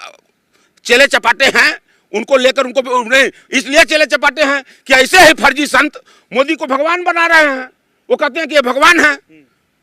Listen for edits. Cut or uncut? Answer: uncut